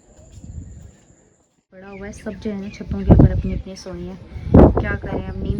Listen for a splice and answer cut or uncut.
cut